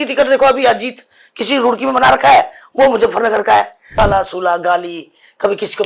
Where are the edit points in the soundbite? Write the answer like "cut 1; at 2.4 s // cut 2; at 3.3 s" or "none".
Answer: cut 1; at 3.8 s